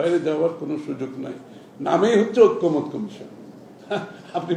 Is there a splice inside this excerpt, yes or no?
no